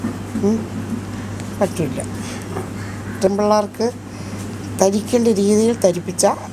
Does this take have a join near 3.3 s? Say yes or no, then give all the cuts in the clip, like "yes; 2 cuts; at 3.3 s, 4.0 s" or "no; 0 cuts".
yes; 1 cut; at 3.3 s